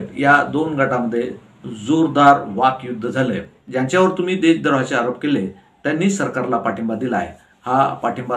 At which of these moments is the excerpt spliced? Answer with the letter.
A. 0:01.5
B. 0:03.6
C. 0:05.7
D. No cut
B